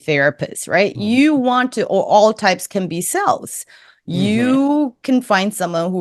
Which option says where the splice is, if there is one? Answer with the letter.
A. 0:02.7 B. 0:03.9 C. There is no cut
C